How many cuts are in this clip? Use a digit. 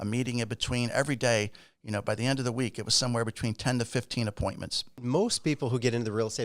1